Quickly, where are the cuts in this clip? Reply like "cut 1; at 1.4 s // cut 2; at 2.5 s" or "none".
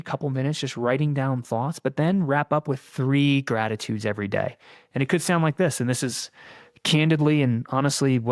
none